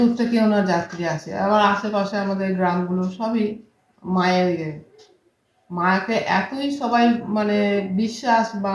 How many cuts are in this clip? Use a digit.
0